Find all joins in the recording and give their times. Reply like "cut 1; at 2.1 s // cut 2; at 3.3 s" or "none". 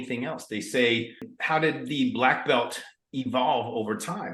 cut 1; at 1.3 s